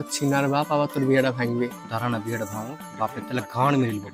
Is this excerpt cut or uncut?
uncut